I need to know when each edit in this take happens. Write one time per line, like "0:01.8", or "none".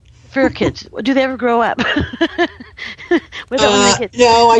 none